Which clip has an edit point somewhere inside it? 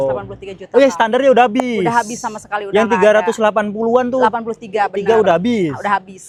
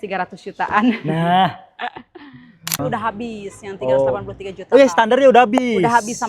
second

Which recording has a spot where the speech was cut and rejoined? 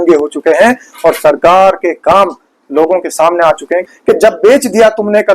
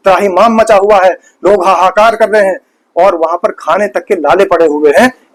first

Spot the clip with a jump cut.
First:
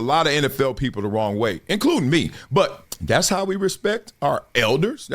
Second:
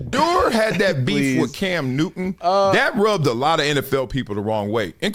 first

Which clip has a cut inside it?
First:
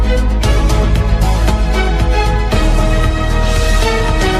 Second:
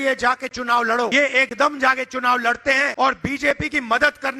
second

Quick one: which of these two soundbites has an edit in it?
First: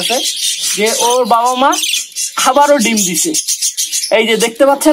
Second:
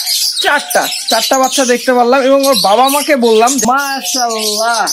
second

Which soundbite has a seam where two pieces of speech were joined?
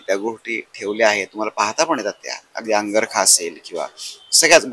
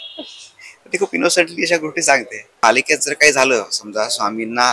second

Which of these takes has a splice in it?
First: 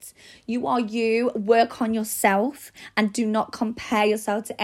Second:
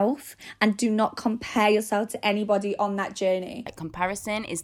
second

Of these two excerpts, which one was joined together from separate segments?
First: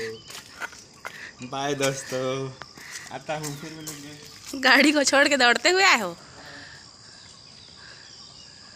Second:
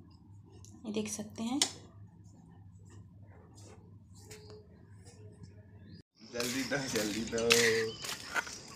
second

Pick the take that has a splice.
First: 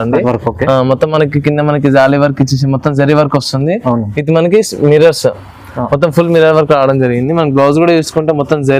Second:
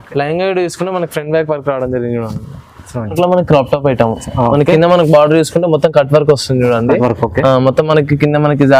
second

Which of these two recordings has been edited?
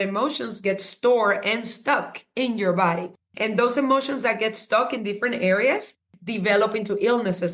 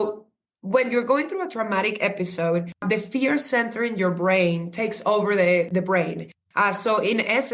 second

